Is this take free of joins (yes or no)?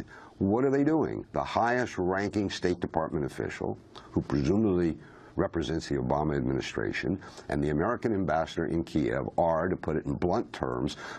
yes